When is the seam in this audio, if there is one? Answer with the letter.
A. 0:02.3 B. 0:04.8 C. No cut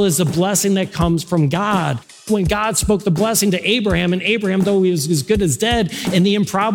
A